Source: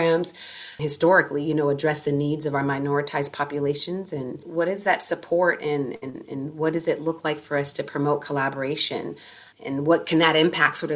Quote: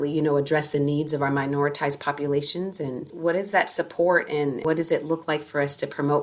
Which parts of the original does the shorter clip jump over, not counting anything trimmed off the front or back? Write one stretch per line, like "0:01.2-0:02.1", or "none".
0:05.9-0:06.5